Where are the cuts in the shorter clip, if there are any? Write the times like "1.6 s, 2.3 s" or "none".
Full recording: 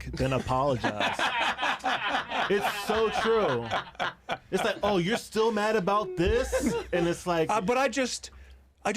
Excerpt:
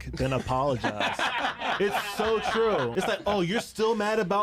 1.4 s, 2.9 s